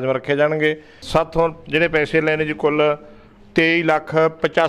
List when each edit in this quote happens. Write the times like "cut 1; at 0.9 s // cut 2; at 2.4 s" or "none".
cut 1; at 0.9 s